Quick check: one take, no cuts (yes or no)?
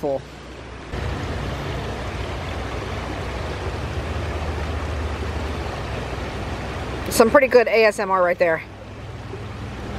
no